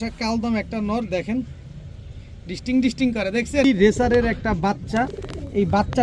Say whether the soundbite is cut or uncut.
cut